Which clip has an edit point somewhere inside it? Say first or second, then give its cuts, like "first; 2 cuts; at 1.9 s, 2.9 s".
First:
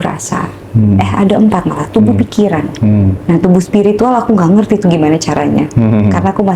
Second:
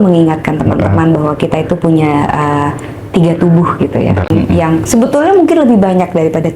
second; 1 cut; at 4.2 s